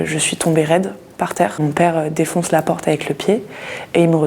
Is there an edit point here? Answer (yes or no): yes